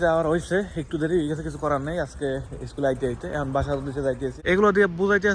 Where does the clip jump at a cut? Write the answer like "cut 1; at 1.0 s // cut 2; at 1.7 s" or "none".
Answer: cut 1; at 4.3 s